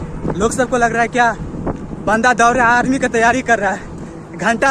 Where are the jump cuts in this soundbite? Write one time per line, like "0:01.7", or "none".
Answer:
none